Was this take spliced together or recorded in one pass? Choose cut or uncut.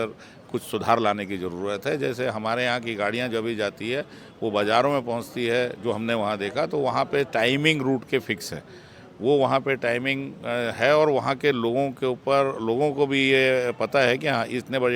uncut